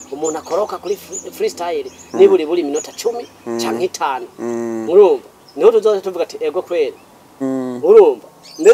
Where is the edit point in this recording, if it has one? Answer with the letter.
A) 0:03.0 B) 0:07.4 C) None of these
B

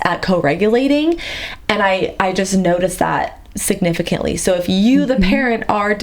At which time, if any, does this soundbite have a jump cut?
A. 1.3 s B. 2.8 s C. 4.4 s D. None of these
D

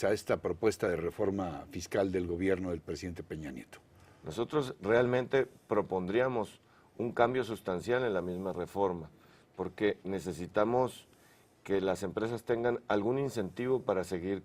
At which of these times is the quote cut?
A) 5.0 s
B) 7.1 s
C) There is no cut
C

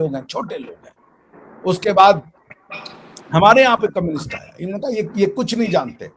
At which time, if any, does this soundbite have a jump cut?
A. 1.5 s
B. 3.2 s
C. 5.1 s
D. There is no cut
D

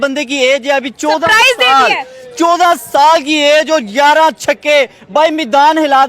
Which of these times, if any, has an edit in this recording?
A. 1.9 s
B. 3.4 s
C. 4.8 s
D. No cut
D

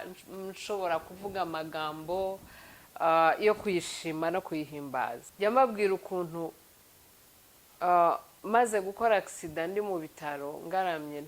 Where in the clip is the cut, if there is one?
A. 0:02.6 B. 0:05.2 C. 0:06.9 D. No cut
B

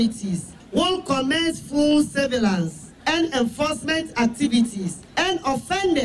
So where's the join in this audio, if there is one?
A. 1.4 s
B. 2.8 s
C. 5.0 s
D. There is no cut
C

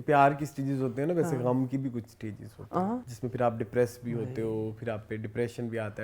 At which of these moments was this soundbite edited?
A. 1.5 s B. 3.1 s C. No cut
B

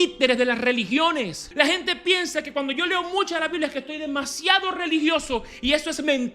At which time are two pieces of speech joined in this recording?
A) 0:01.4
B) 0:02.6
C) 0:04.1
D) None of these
A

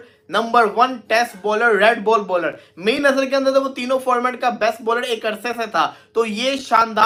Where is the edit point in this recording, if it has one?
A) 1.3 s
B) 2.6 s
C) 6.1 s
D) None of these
D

